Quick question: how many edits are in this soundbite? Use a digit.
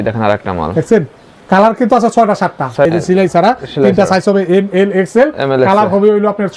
1